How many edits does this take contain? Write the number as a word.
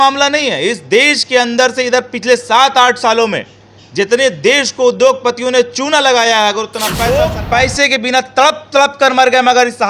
one